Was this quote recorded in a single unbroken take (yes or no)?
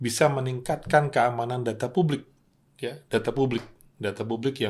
yes